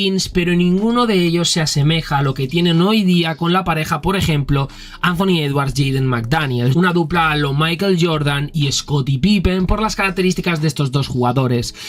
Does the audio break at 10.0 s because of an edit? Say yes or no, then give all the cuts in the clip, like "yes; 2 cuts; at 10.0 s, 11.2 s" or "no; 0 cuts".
no; 1 cut; at 6.7 s